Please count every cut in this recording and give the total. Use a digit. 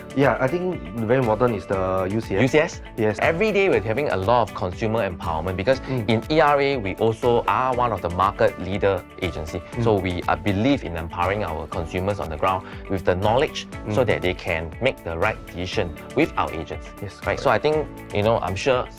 0